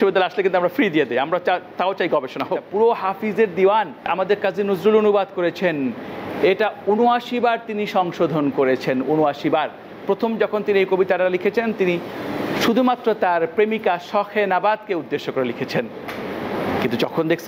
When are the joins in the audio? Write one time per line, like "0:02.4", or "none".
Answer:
0:02.7
0:04.1